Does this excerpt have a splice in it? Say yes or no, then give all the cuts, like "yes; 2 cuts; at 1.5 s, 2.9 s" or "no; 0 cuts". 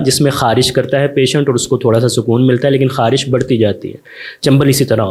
no; 0 cuts